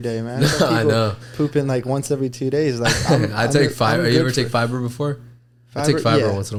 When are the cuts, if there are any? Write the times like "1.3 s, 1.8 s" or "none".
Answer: none

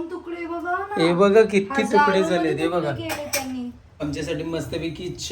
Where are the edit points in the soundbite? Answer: 3.8 s

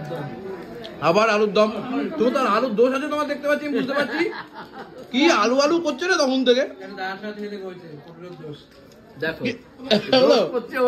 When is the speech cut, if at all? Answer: none

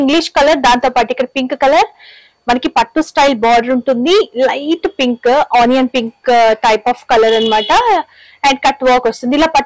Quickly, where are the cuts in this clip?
none

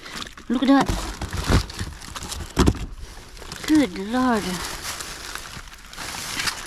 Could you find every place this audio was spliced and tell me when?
none

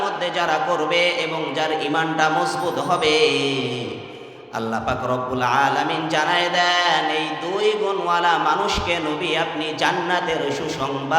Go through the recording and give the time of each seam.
none

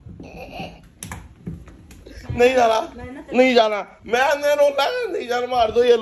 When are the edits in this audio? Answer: none

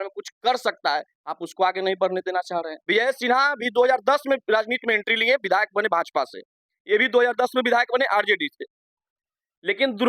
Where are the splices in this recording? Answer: 2.7 s

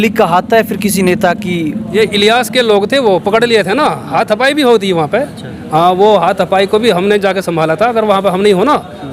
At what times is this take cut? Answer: none

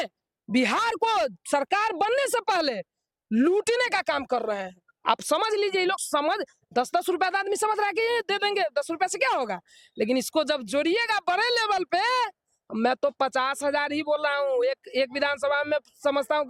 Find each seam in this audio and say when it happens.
none

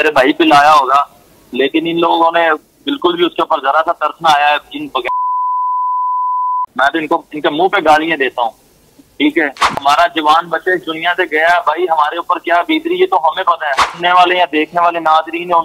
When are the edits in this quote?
9.7 s, 13.8 s

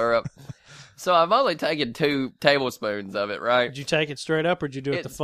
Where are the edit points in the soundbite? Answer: 2.3 s

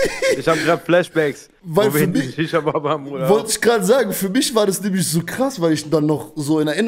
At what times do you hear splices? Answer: none

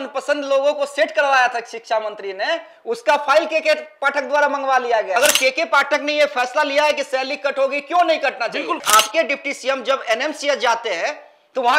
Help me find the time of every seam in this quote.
5.1 s, 8.8 s

